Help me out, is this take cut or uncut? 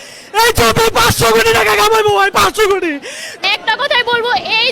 cut